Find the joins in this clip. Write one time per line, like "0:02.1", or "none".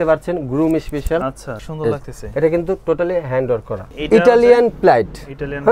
0:01.6
0:03.9